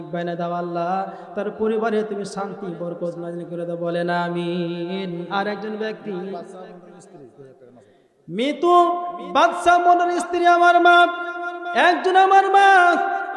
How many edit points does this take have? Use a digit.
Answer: 1